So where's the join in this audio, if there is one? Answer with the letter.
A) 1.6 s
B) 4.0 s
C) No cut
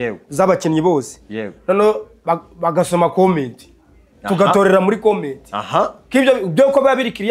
C